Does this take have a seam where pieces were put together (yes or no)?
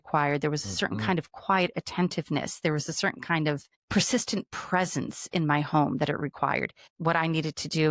yes